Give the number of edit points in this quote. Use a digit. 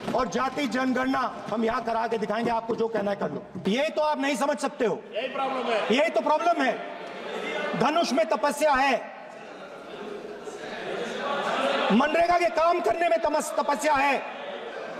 1